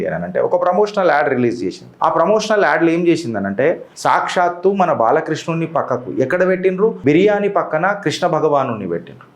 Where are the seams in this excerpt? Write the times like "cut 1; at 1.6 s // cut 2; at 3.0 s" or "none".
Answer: cut 1; at 3.9 s // cut 2; at 7.0 s

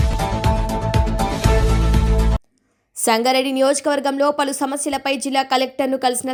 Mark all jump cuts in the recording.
none

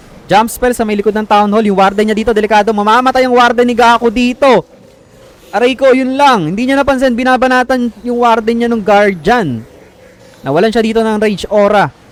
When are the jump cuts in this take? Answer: none

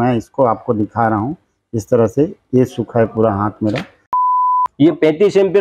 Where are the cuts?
cut 1; at 4.4 s

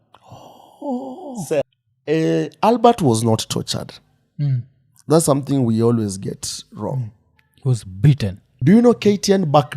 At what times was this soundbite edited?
cut 1; at 1.6 s // cut 2; at 8.5 s

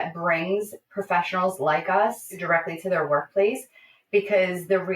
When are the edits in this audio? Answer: cut 1; at 2.4 s

